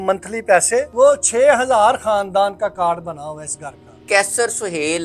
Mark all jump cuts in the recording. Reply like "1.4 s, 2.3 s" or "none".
0.9 s, 3.9 s